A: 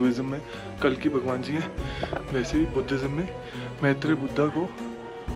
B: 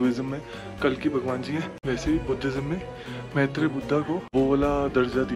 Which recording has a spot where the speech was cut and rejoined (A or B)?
B